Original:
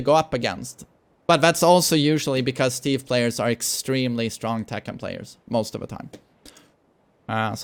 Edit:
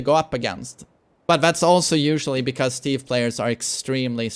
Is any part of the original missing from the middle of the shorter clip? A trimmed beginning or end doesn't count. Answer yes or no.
no